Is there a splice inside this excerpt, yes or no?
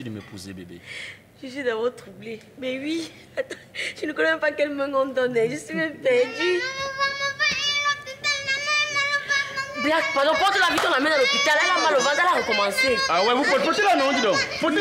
no